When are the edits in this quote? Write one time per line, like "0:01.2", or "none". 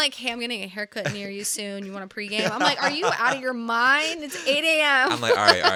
none

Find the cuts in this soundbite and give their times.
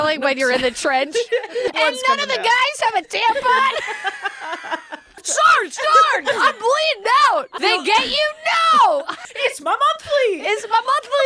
0:01.7
0:05.2
0:07.6
0:09.2

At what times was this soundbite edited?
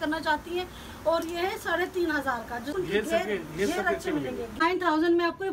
0:02.7
0:04.6

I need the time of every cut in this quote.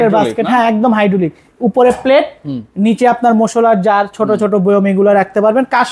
none

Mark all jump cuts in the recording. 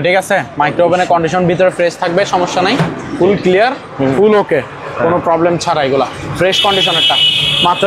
none

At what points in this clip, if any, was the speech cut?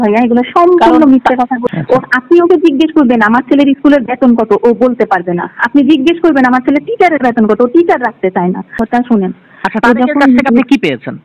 0:01.6
0:08.8

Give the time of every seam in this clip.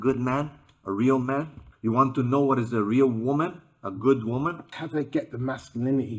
0:01.6
0:04.6

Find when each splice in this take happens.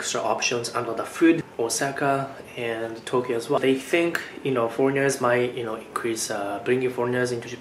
0:01.5
0:03.6

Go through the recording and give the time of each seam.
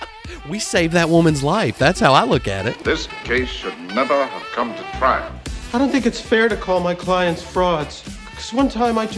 0:02.7

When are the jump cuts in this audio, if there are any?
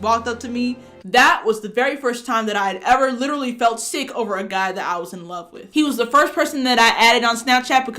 0:00.9
0:05.6

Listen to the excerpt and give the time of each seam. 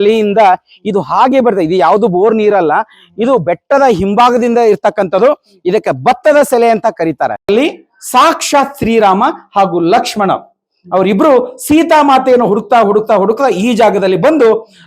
0:07.5

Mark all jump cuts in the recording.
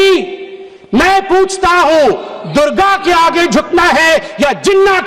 none

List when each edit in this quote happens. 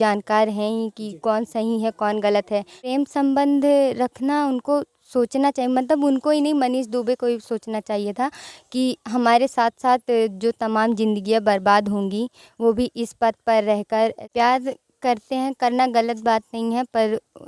0:02.8
0:14.2

